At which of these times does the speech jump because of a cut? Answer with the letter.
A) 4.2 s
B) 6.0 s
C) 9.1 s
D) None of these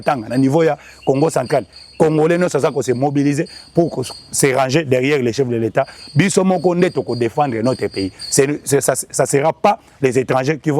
B